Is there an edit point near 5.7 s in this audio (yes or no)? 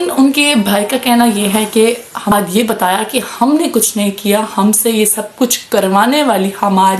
no